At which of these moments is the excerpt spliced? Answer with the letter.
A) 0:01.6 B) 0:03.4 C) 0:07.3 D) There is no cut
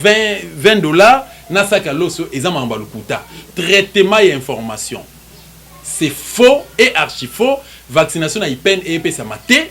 B